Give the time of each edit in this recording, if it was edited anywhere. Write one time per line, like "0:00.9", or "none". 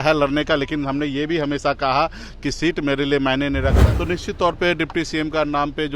0:03.9